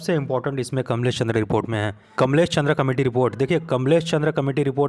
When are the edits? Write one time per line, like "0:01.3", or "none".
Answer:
0:02.0